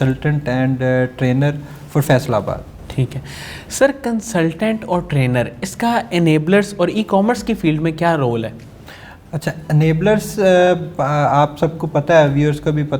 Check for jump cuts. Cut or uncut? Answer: uncut